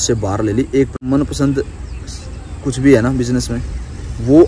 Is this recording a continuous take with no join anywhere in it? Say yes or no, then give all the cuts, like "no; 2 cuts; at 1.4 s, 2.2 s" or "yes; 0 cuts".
no; 1 cut; at 1.1 s